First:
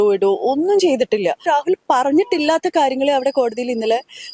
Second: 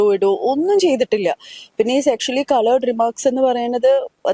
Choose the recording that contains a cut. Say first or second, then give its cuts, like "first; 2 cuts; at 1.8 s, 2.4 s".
first; 1 cut; at 1.4 s